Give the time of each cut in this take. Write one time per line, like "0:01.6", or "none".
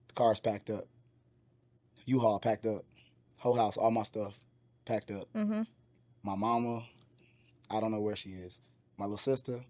none